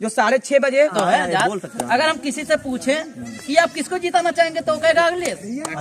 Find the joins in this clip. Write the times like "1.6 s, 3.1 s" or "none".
0.9 s